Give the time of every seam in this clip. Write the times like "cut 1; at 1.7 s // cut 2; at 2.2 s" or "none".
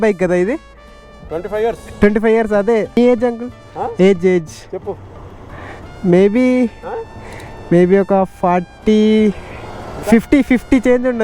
cut 1; at 3.0 s